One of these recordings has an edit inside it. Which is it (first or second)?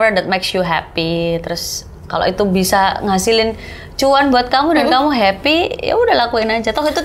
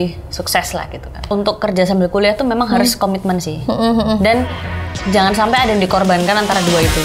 second